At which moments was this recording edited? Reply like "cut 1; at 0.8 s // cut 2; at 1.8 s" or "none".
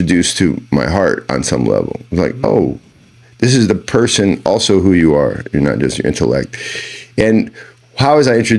none